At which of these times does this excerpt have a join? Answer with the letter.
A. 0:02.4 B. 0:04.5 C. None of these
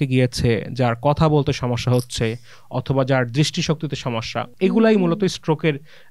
B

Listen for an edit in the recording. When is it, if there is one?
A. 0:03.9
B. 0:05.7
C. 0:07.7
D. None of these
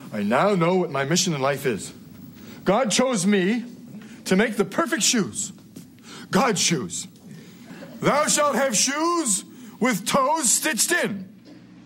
C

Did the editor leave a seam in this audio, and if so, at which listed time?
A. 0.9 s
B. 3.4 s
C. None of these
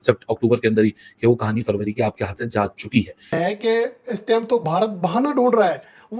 B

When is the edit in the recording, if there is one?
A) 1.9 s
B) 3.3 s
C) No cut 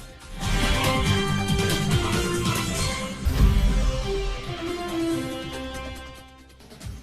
B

